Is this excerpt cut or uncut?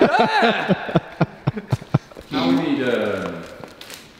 uncut